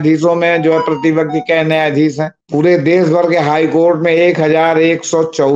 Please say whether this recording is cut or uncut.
cut